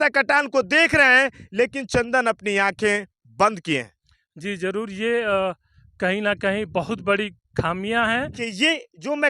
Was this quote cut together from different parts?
yes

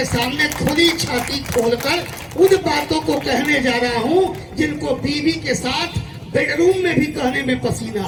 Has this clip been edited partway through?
no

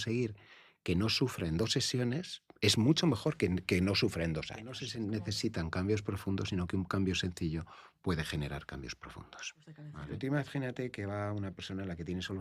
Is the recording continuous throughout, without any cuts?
no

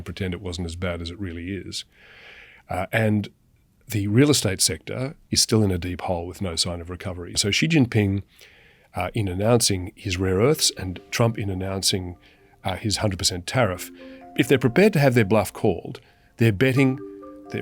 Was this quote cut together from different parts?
yes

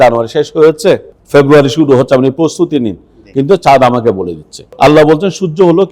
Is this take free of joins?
no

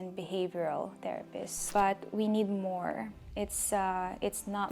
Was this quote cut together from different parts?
yes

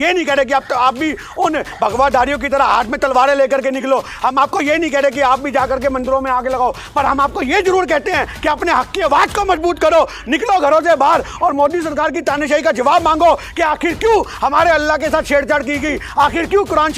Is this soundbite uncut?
yes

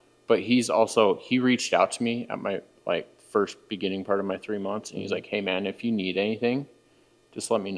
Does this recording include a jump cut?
no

